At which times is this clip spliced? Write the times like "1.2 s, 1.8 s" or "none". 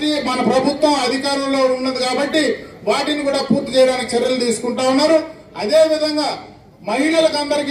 none